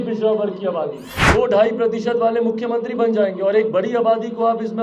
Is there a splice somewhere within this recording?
yes; 1 cut; at 1.1 s

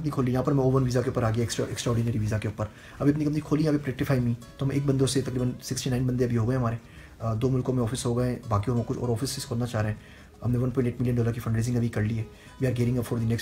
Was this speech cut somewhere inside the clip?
no; 0 cuts

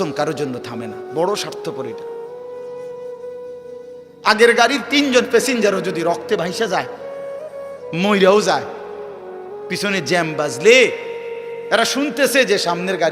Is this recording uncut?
no; 2 cuts; at 1.8 s, 4.2 s

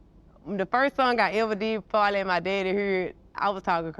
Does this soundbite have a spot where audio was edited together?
no; 0 cuts

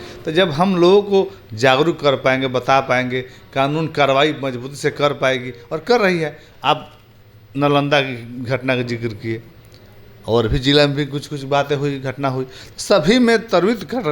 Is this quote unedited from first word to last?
yes; 0 cuts

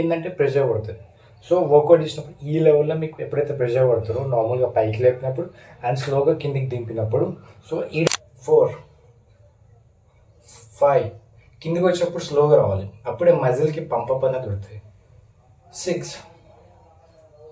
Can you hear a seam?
yes; 1 cut; at 8.1 s

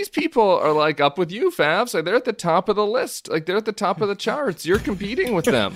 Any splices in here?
no; 0 cuts

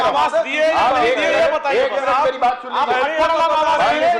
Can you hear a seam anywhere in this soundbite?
no; 0 cuts

